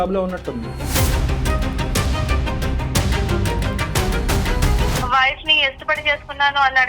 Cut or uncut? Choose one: cut